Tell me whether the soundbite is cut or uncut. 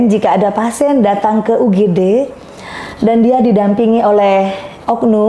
uncut